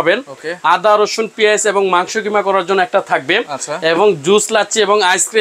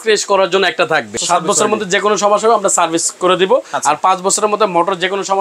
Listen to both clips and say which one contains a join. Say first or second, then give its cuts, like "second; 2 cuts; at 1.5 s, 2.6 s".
second; 1 cut; at 1.2 s